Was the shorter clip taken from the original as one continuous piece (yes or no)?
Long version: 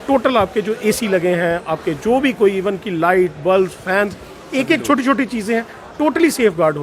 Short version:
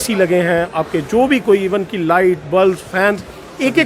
yes